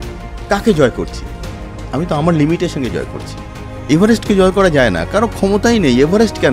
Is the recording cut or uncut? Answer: uncut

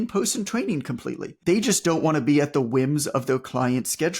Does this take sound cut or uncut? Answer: cut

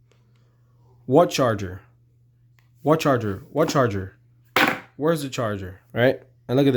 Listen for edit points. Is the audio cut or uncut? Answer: cut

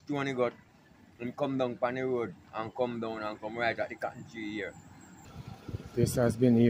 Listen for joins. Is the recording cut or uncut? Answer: cut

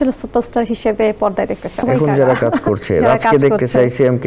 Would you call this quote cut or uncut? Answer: cut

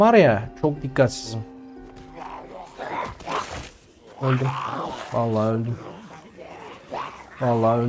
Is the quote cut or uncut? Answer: cut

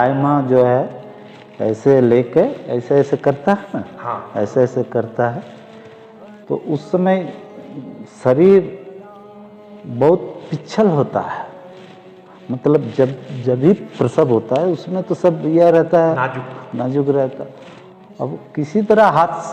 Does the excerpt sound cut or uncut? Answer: uncut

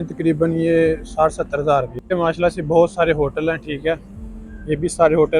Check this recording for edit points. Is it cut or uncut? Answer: cut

